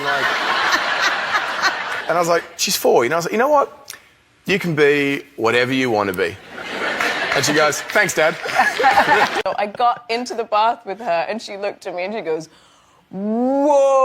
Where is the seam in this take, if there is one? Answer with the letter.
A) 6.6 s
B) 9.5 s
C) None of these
B